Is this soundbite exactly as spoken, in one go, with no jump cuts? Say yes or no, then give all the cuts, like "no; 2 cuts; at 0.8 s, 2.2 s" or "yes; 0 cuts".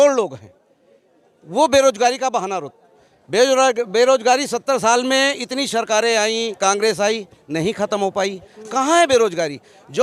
yes; 0 cuts